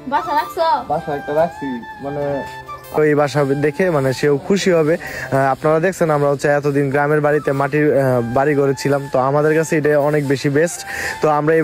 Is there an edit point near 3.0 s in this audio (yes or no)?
yes